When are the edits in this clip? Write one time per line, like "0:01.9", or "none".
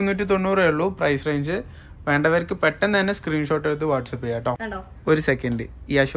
0:04.6